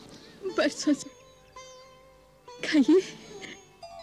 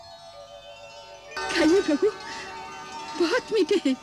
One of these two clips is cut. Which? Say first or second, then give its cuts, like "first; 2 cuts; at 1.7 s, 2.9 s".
second; 1 cut; at 1.4 s